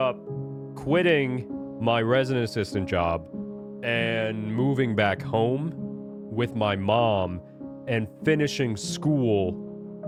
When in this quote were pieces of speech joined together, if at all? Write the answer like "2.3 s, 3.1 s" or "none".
none